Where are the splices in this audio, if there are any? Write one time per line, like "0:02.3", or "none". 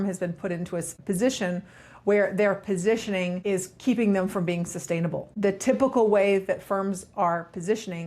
0:01.0
0:03.4
0:05.2